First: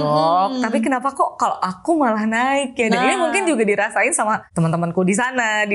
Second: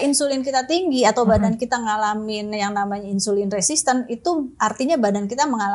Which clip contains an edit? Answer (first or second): first